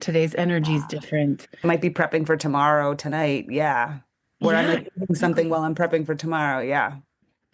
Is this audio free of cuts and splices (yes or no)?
yes